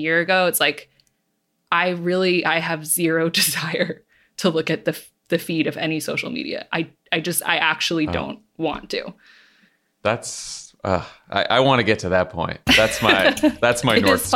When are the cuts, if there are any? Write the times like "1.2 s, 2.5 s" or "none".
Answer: none